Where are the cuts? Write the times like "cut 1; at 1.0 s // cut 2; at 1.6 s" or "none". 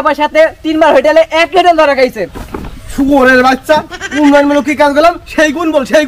cut 1; at 2.4 s